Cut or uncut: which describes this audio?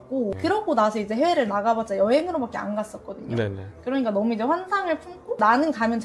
uncut